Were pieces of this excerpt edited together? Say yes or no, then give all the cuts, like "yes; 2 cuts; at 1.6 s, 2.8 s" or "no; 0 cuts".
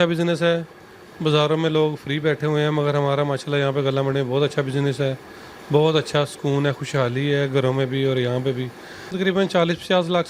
yes; 1 cut; at 9.1 s